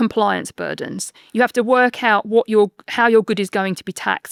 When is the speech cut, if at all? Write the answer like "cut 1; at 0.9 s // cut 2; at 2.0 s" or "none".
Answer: none